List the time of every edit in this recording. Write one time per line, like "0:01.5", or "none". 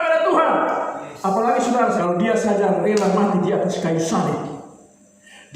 0:02.0